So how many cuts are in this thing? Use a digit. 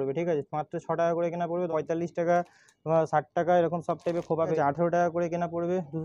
2